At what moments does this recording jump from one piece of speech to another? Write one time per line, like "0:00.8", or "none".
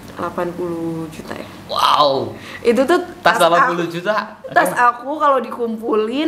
0:04.4